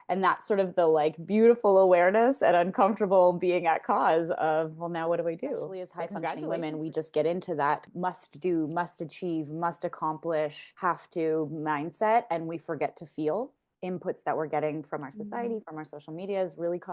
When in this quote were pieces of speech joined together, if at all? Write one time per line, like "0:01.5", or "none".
0:06.2
0:13.7